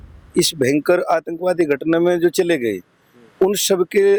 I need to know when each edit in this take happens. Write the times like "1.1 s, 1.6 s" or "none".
none